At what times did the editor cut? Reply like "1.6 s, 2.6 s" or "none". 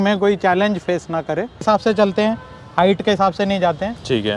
1.6 s